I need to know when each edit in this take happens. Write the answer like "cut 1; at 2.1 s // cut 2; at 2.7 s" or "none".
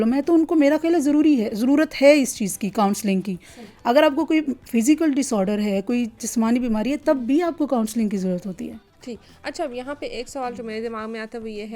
none